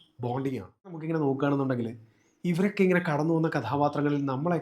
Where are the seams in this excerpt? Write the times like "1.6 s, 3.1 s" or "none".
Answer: 1.0 s